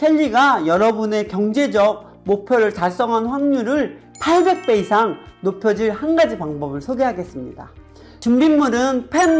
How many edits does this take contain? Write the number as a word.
zero